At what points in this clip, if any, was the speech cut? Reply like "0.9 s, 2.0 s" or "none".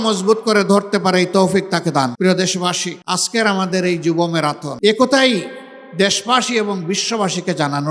2.1 s, 2.9 s, 4.7 s